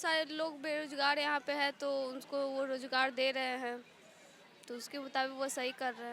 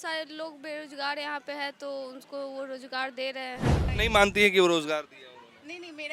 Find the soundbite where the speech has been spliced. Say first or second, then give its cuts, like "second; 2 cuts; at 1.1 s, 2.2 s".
second; 1 cut; at 3.9 s